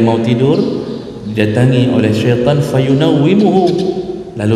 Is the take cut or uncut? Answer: uncut